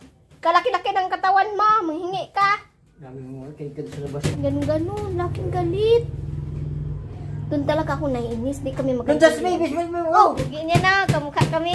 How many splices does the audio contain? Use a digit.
2